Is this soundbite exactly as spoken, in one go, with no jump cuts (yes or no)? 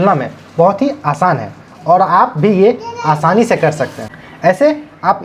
no